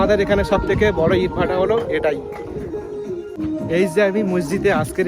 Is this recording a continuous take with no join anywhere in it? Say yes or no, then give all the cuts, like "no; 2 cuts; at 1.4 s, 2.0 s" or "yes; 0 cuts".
yes; 0 cuts